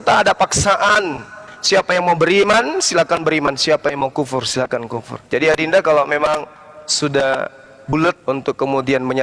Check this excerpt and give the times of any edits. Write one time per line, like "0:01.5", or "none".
0:05.1
0:08.2